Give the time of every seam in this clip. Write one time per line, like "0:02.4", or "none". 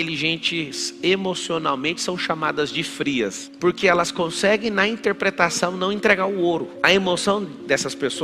0:03.5